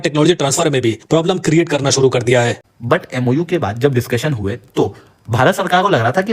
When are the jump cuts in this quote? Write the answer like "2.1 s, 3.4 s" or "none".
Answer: 2.6 s